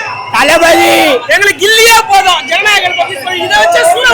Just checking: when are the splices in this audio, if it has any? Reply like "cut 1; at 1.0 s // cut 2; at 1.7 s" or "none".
cut 1; at 1.3 s